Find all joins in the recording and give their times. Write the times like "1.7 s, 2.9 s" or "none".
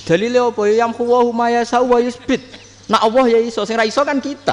none